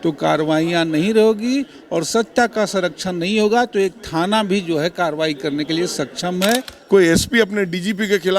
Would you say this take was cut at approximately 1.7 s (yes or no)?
no